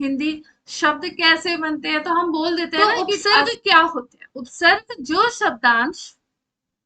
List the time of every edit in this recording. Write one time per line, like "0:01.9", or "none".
0:02.6

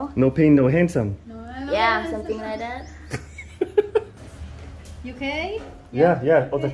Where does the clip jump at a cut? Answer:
0:04.1

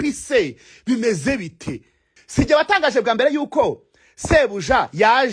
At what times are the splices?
0:02.2

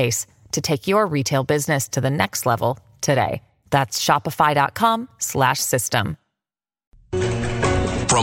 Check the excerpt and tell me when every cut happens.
0:07.1

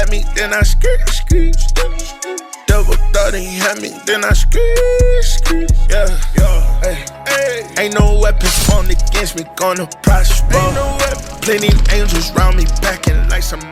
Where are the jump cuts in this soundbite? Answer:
none

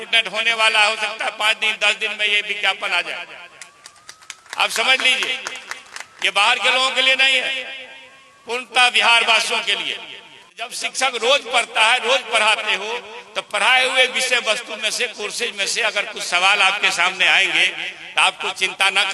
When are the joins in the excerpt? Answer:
0:10.8

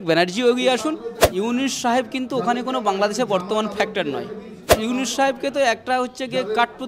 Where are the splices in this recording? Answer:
0:01.2
0:04.8

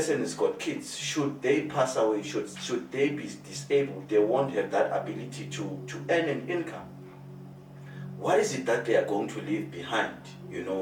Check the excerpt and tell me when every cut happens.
none

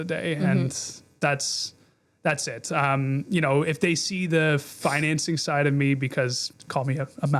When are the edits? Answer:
0:06.4

